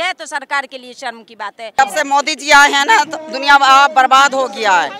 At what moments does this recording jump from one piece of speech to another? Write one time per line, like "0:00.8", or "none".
0:01.7